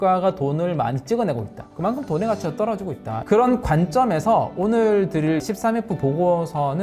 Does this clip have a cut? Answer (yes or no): yes